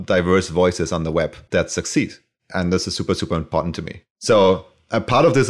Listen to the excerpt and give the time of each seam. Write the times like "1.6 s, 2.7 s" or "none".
1.4 s